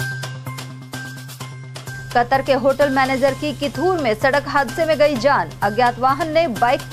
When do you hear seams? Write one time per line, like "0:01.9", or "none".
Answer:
0:01.0